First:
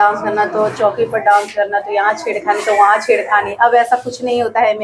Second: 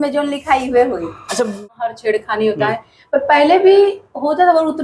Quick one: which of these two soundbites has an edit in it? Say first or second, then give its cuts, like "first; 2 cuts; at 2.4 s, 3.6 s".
second; 1 cut; at 1.6 s